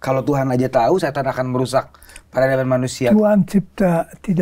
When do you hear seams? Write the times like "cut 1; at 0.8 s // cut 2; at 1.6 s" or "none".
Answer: none